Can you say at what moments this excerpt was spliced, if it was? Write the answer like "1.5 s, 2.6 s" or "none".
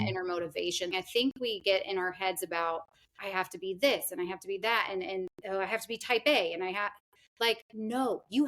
0.9 s